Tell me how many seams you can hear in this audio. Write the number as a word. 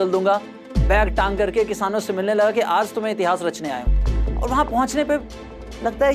zero